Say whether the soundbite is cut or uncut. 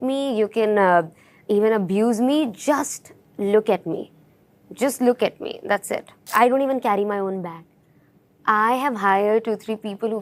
cut